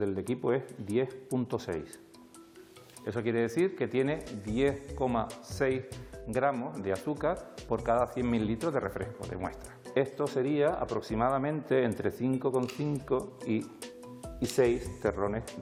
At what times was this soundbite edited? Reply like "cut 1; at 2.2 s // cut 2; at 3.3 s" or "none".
none